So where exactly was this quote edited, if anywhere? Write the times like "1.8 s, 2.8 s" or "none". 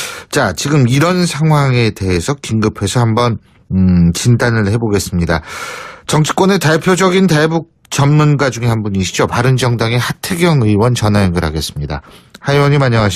10.6 s